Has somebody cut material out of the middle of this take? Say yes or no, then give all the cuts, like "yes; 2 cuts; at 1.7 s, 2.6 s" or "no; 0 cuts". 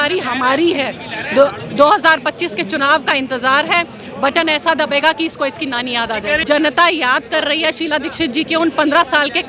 yes; 1 cut; at 6.4 s